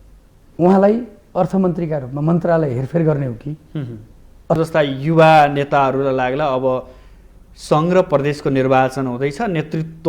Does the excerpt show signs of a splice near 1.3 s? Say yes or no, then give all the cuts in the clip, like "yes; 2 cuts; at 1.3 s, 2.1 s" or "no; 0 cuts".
no; 1 cut; at 4.6 s